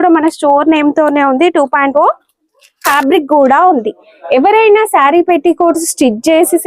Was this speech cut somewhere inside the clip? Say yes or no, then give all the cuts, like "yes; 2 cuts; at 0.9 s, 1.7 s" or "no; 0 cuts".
yes; 1 cut; at 2.9 s